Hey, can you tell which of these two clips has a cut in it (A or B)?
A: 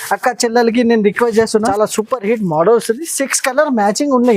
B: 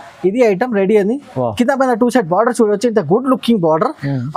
A